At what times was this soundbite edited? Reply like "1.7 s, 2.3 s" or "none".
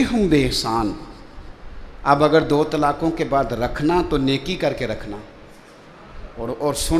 none

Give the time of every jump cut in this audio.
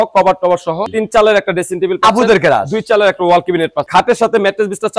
0.9 s, 3.8 s

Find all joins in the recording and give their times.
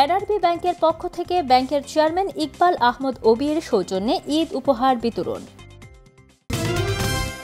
6.5 s

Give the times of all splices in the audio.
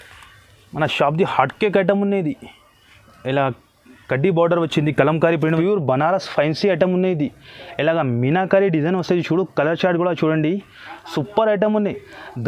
5.6 s

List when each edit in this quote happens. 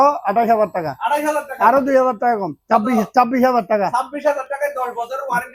none

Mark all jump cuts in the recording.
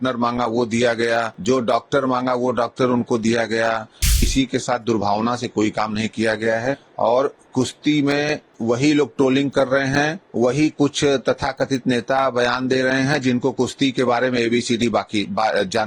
1.3 s, 4.3 s, 6.9 s, 8.5 s, 10.2 s

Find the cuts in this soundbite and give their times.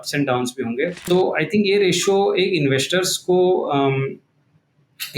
1.0 s

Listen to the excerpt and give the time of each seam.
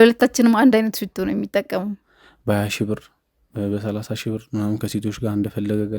2.0 s

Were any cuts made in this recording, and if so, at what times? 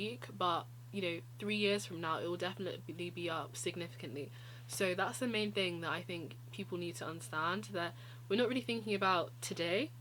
none

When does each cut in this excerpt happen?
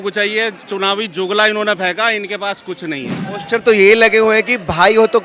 3.3 s

